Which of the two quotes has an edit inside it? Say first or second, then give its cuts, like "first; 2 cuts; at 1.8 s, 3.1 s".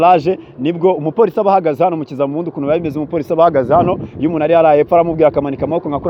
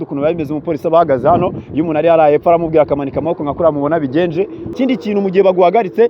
second; 1 cut; at 4.7 s